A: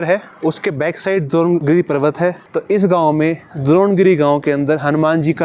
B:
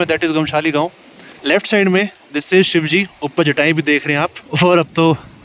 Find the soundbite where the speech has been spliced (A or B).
A